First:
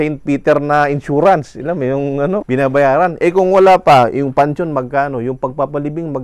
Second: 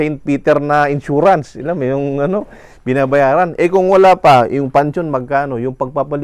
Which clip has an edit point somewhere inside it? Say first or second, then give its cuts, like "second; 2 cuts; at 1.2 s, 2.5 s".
first; 1 cut; at 2.4 s